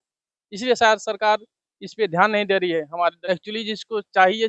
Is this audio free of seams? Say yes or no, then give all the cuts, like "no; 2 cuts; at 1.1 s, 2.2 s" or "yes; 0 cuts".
no; 1 cut; at 3.2 s